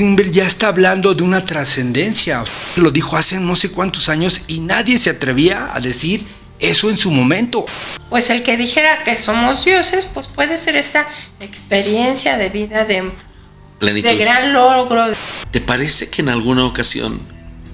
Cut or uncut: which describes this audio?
cut